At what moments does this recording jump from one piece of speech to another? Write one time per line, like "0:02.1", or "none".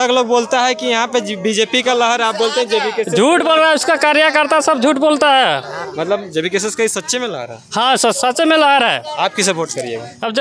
none